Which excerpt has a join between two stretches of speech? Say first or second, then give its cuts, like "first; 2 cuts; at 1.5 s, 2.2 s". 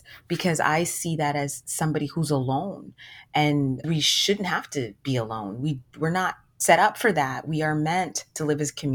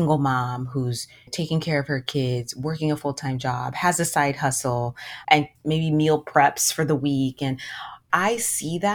second; 1 cut; at 8.1 s